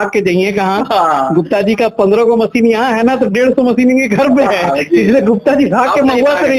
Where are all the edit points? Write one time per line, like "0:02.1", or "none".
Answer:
none